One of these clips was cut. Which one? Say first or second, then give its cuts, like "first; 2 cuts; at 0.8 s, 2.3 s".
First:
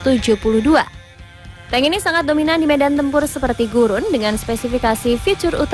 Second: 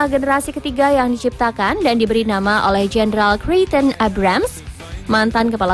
second; 1 cut; at 1.5 s